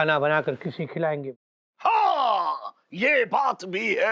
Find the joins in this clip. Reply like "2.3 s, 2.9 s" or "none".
none